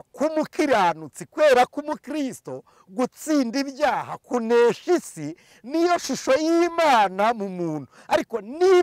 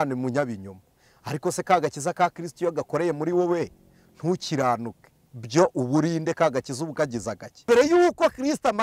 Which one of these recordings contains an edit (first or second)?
second